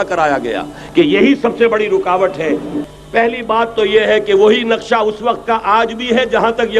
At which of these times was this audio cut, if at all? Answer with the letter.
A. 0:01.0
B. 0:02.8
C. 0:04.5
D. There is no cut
B